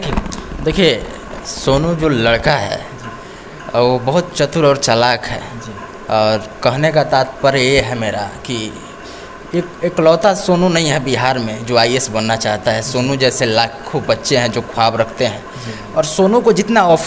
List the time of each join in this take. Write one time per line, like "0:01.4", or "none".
none